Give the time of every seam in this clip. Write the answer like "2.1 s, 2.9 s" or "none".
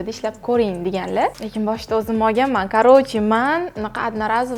1.3 s

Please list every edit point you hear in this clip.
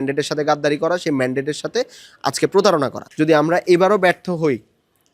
3.0 s

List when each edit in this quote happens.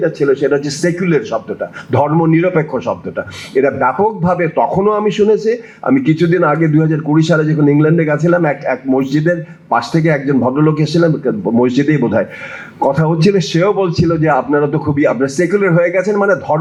none

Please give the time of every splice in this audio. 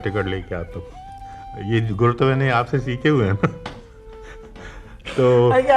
none

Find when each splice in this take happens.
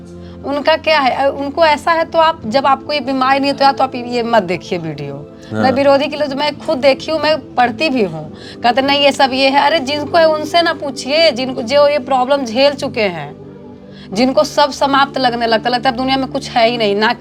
none

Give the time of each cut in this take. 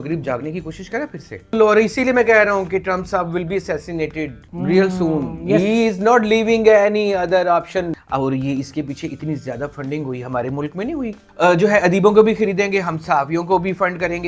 1.6 s, 7.9 s, 11.2 s

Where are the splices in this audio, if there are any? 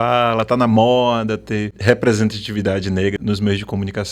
3.2 s

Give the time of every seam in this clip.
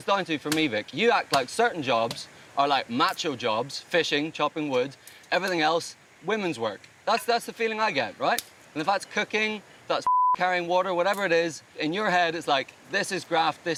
none

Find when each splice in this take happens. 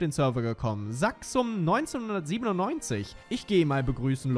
3.1 s

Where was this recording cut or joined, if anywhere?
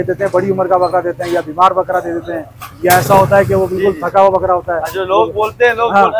none

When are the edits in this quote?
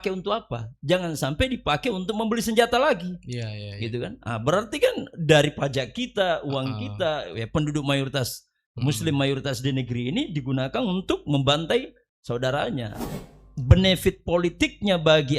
13.0 s

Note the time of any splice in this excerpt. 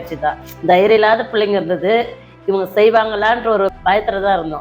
3.7 s

